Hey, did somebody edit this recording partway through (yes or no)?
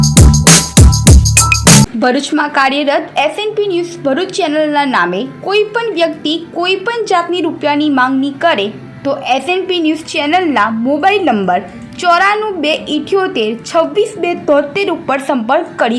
yes